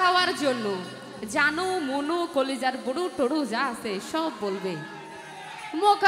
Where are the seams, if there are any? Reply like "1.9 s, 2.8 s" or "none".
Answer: none